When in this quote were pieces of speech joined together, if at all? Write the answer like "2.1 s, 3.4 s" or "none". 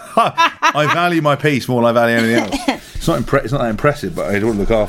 none